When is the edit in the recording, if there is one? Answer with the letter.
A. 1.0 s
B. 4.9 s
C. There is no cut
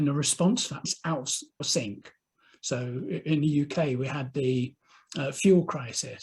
A